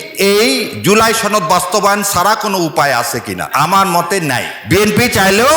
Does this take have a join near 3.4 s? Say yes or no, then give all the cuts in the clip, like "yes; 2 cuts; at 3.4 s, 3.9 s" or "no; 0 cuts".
yes; 2 cuts; at 3.4 s, 4.5 s